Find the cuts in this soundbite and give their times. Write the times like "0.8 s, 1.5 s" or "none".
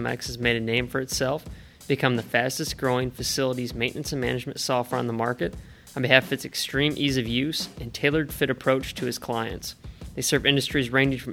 none